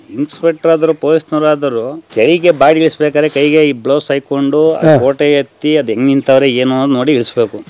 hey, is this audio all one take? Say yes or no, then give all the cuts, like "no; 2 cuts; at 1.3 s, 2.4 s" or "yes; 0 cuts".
no; 1 cut; at 2.0 s